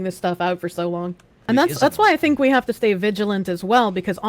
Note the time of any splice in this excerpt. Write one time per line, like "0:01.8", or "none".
0:01.3